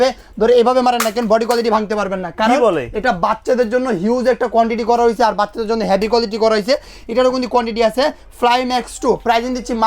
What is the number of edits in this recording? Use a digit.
0